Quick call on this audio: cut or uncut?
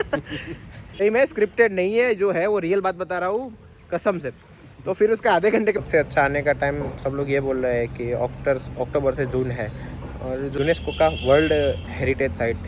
cut